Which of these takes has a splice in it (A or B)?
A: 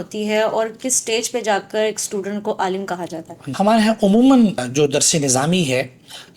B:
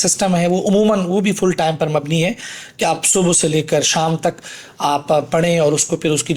A